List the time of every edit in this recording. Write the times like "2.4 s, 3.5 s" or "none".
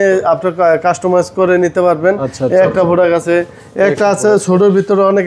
none